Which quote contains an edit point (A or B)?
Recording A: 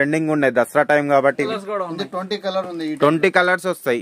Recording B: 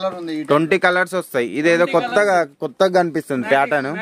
A